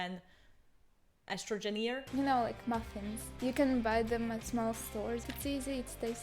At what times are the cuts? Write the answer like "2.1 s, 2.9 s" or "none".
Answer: 2.0 s, 3.2 s, 4.4 s, 5.3 s